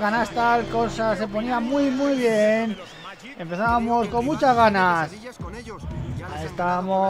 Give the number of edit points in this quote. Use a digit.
0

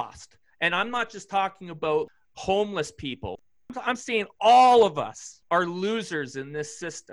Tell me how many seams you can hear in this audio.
3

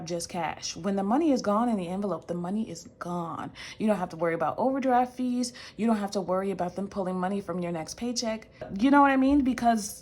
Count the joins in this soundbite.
1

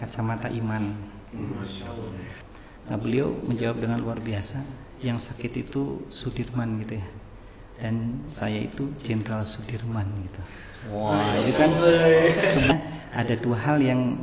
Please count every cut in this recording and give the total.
2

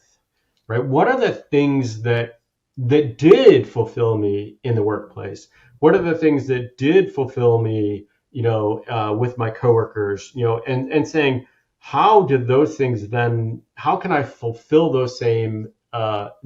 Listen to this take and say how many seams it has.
0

